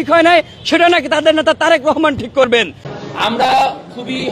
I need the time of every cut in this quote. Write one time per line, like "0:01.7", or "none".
0:02.8